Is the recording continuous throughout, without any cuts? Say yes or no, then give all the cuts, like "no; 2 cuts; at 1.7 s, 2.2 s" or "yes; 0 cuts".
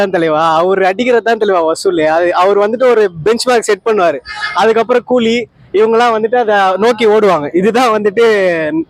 yes; 0 cuts